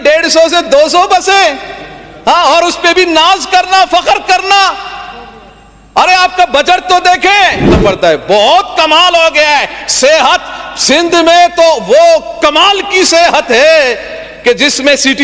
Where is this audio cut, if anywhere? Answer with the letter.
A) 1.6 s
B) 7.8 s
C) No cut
B